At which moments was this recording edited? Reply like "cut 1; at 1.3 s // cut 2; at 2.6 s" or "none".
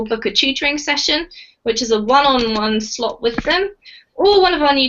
cut 1; at 3.8 s